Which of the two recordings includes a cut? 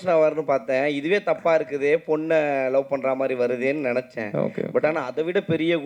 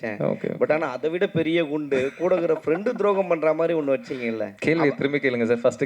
second; 1 cut; at 4.5 s

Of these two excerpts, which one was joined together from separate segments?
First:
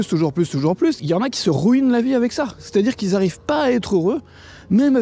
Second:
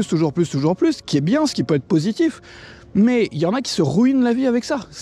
first; 1 cut; at 1.0 s

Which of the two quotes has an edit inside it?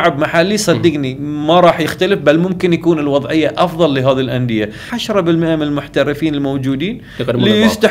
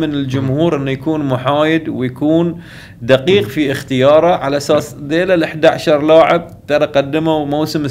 first; 1 cut; at 4.9 s

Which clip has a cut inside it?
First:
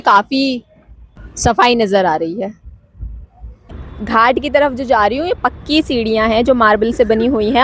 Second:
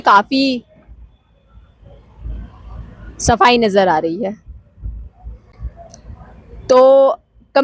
first; 2 cuts; at 1.6 s, 3.9 s

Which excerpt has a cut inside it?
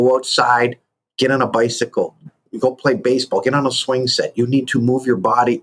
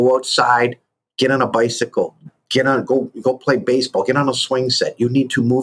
first; 1 cut; at 2.5 s

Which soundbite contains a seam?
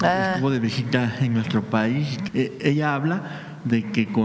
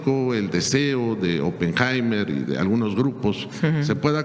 first; 1 cut; at 2.2 s

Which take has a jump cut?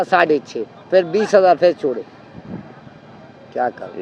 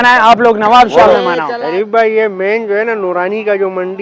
second; 1 cut; at 1.5 s

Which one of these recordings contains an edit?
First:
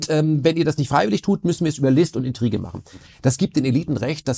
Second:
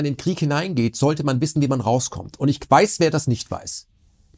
first; 1 cut; at 3.0 s

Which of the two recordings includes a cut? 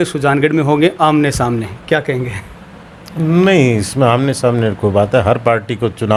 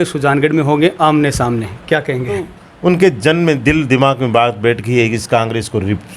second; 1 cut; at 2.6 s

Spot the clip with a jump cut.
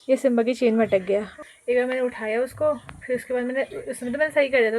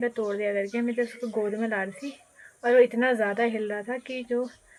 first; 1 cut; at 1.3 s

